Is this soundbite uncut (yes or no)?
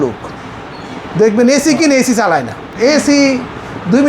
no